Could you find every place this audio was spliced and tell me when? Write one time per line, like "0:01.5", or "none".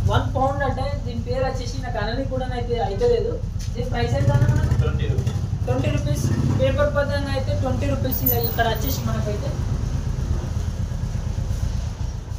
none

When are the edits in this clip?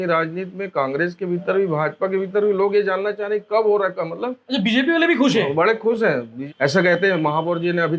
0:06.6

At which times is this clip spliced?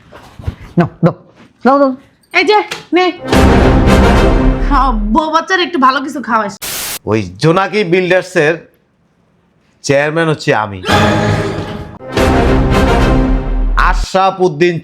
0:06.5

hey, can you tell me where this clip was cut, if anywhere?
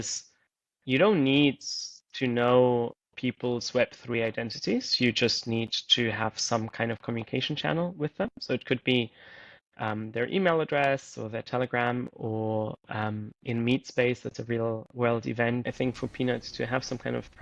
0:15.7

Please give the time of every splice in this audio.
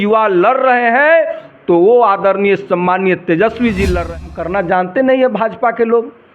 0:04.1

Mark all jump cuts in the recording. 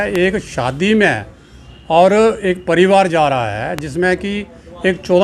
none

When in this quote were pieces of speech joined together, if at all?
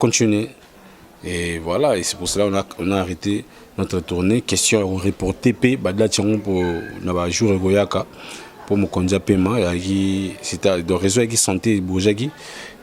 none

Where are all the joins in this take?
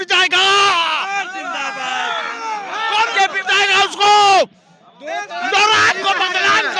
none

